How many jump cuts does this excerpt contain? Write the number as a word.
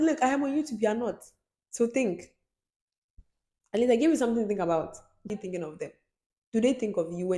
one